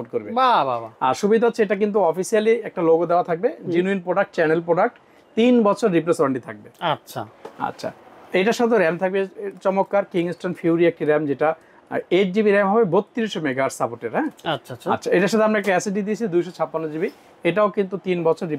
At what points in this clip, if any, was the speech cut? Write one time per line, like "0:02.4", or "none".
none

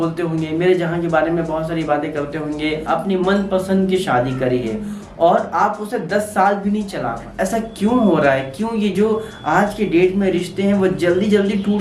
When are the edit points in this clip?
0:02.8
0:07.2

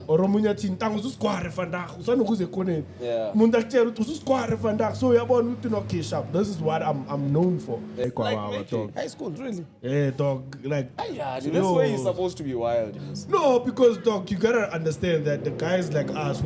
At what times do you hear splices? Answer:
0:08.1

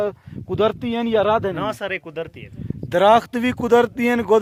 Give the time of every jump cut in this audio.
none

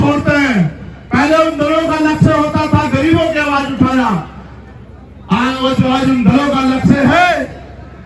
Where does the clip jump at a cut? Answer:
none

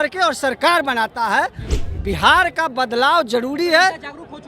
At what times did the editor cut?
0:01.8

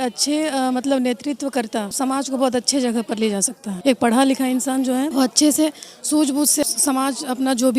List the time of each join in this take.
0:01.9
0:03.7
0:05.1
0:06.6

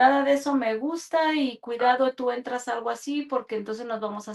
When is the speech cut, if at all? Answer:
none

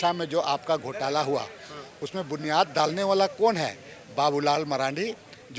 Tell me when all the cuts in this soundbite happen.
none

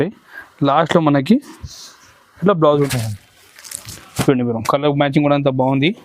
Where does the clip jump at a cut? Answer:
0:02.9

